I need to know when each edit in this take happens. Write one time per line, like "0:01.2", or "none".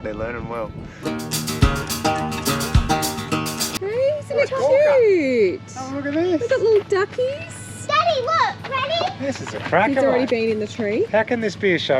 0:01.0
0:03.6